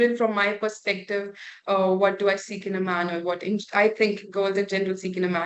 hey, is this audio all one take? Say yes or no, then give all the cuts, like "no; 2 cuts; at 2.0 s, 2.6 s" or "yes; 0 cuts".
yes; 0 cuts